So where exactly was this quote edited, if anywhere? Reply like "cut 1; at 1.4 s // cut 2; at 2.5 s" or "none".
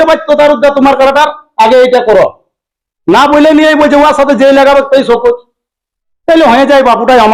none